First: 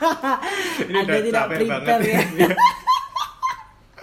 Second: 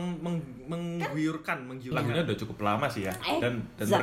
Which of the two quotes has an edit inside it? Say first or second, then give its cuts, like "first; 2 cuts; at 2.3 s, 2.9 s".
second; 1 cut; at 1.9 s